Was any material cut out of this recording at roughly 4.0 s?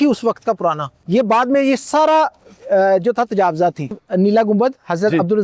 yes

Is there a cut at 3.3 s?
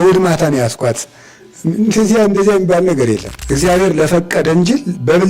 yes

